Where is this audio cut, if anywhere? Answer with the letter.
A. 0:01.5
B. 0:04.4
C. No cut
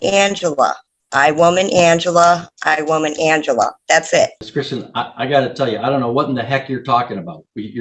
B